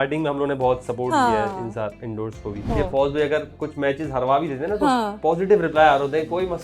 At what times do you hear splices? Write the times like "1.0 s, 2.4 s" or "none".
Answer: 2.7 s